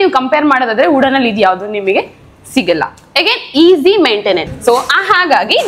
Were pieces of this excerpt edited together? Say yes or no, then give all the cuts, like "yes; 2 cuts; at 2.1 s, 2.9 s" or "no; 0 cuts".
yes; 1 cut; at 4.5 s